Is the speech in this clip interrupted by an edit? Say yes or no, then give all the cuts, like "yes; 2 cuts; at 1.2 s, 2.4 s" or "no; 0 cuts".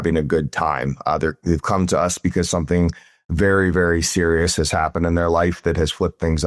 no; 0 cuts